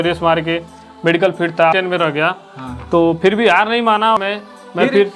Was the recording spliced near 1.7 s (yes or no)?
yes